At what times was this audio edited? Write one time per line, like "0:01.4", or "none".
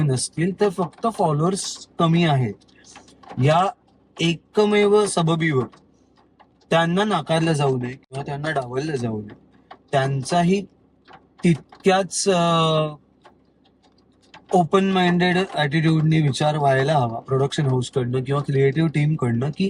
none

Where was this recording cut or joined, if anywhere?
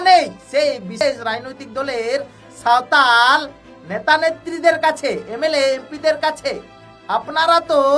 0:01.0

